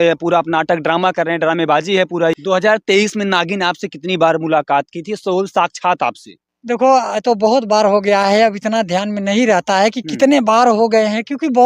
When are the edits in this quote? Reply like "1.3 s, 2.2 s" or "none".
2.3 s